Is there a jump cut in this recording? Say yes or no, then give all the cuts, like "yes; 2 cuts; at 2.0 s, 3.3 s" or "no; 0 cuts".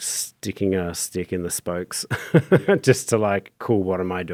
no; 0 cuts